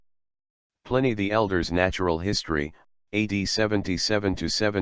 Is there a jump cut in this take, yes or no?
yes